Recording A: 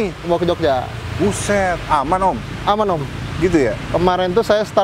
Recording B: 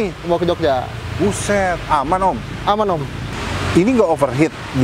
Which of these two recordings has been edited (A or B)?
B